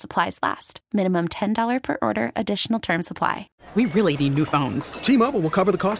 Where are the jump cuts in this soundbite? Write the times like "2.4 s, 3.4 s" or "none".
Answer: 3.5 s